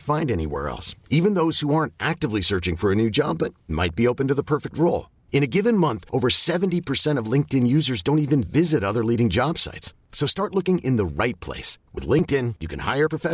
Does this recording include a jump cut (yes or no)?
no